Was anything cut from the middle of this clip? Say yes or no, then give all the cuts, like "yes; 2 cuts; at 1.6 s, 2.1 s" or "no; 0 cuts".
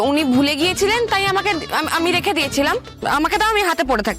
yes; 1 cut; at 2.9 s